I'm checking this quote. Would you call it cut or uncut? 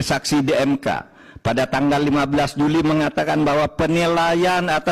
uncut